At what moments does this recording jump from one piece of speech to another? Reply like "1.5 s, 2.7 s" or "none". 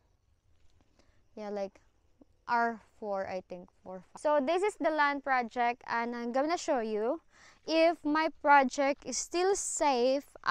4.0 s